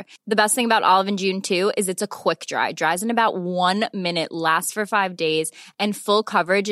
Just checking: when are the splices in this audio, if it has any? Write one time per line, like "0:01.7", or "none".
none